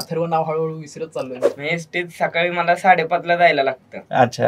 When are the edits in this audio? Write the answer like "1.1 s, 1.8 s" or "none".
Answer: 1.5 s